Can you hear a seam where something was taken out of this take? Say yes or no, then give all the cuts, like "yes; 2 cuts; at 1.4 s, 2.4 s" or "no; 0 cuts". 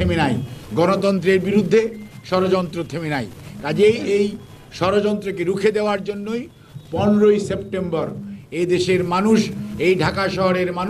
no; 0 cuts